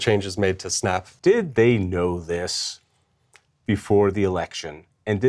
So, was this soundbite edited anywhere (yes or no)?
yes